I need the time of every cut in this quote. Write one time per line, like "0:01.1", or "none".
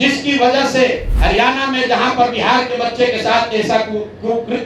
0:01.1